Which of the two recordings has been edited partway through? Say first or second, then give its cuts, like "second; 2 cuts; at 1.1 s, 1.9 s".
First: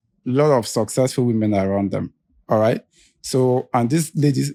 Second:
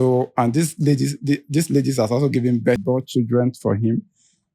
second; 1 cut; at 2.8 s